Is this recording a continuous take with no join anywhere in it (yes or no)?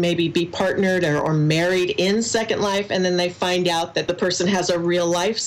no